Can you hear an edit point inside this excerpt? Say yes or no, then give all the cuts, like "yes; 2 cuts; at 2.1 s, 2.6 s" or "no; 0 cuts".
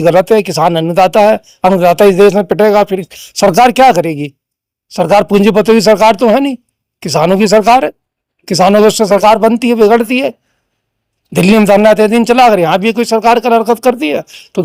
no; 0 cuts